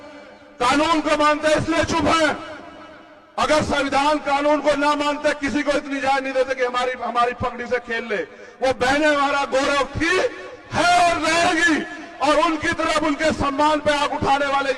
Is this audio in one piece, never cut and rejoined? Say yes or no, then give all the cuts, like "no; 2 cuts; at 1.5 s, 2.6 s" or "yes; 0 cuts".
yes; 0 cuts